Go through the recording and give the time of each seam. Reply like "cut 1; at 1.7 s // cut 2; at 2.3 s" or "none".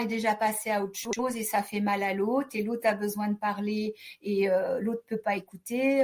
none